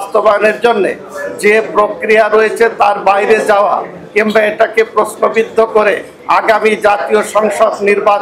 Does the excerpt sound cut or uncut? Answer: uncut